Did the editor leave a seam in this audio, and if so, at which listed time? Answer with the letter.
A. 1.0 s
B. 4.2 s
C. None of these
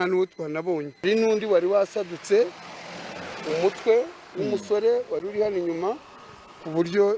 A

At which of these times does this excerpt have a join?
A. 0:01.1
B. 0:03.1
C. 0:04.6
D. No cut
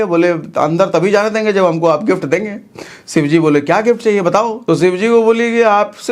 C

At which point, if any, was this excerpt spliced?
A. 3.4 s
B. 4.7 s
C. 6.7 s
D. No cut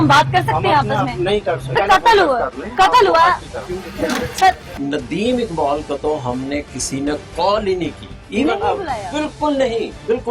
B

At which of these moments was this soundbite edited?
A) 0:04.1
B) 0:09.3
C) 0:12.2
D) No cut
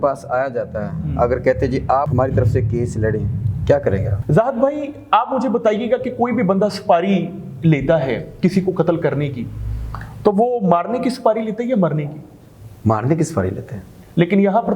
A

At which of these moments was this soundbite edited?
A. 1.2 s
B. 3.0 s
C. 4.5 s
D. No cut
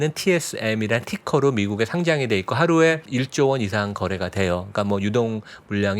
B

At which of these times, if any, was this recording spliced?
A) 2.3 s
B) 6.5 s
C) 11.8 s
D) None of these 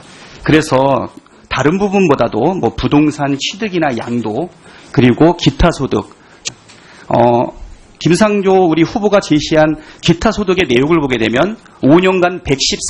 D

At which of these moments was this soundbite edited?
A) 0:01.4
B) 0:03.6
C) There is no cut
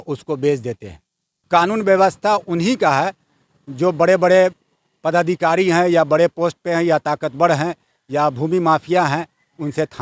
A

